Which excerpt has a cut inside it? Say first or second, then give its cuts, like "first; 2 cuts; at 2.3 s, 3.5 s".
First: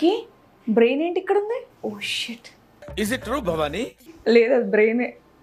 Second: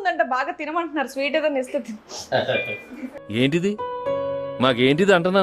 first; 1 cut; at 4.1 s